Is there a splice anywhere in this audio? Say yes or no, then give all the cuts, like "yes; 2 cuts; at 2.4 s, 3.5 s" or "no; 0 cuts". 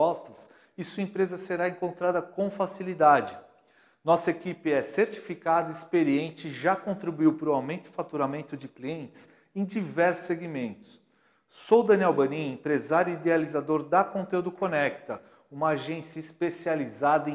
no; 0 cuts